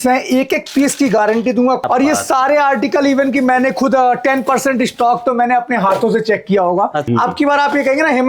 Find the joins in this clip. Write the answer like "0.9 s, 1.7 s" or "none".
1.8 s, 7.1 s